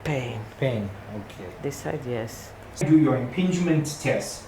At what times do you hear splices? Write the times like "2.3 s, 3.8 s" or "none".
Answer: 2.8 s